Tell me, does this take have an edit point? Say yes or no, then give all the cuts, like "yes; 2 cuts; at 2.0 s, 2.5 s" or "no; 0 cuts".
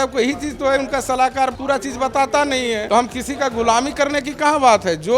yes; 2 cuts; at 1.6 s, 2.8 s